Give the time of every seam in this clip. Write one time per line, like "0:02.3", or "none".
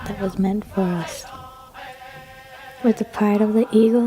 0:01.1
0:02.8